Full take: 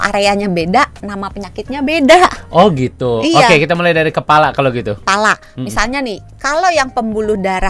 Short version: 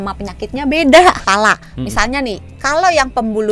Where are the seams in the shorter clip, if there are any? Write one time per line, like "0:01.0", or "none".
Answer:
0:01.2